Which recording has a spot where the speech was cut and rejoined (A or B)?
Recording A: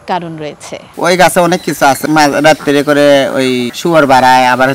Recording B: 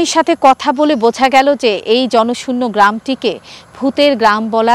A